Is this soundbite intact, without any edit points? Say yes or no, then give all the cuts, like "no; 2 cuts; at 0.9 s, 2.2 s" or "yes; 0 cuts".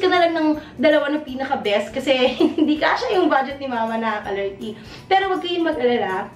yes; 0 cuts